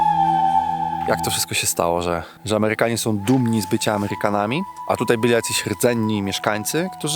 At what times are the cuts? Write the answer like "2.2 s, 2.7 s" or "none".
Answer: 1.1 s

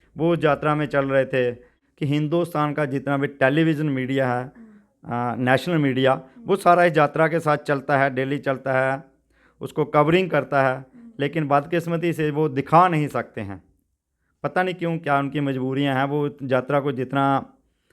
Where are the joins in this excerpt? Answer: 1.7 s

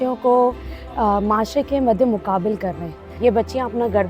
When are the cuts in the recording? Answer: 3.2 s

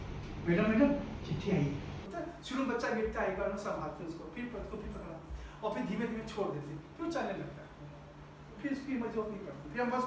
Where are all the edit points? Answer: 2.0 s

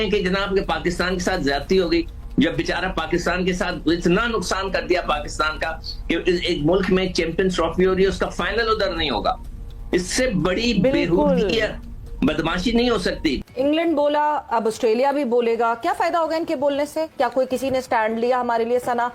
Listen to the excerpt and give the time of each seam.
13.4 s

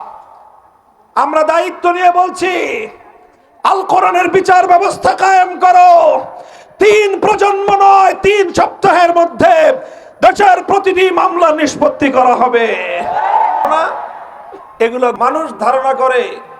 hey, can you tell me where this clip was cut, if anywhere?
15.1 s

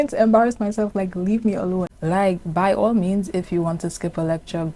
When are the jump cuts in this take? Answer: 1.9 s

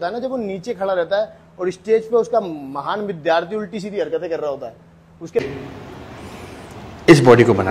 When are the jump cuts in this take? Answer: 5.4 s

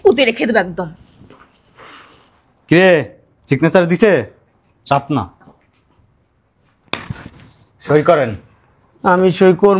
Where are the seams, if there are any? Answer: none

